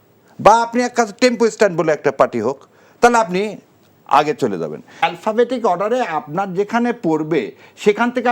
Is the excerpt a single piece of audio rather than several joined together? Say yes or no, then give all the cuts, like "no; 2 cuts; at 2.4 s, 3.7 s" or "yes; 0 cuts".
no; 1 cut; at 5.0 s